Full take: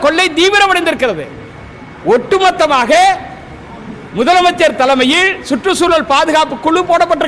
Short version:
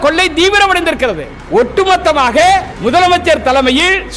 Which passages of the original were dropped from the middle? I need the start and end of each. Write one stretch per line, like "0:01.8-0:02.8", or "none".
0:01.3-0:01.9
0:03.3-0:04.0